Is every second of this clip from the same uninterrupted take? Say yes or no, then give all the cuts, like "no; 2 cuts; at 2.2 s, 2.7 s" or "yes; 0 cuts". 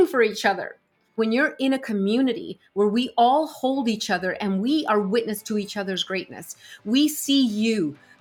no; 1 cut; at 1.2 s